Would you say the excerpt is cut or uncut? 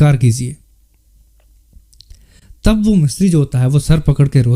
uncut